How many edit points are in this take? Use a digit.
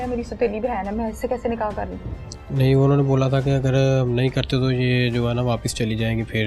0